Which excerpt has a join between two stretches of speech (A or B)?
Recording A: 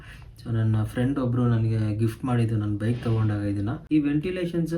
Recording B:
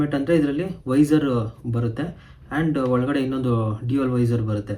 A